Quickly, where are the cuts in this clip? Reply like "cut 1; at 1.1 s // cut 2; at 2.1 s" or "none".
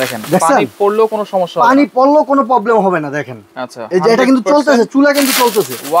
none